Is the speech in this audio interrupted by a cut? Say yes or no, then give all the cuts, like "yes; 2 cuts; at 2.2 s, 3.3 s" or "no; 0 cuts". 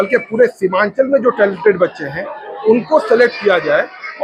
no; 0 cuts